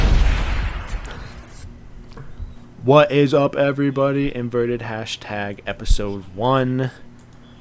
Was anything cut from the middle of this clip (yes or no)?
yes